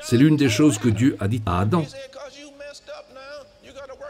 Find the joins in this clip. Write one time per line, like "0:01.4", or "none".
0:01.9